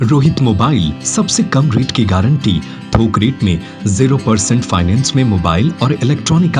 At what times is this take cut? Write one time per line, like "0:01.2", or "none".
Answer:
none